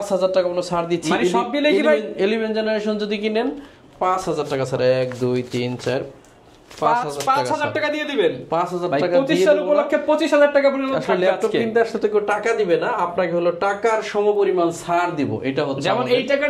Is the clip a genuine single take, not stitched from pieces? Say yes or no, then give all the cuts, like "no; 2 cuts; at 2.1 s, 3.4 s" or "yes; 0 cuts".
yes; 0 cuts